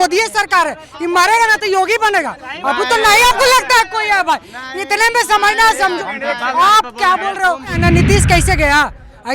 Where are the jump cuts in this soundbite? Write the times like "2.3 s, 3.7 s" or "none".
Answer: 7.8 s